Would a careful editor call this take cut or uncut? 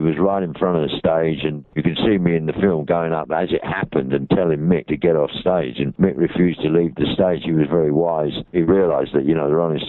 cut